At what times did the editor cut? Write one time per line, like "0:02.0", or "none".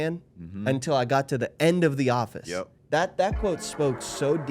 0:02.7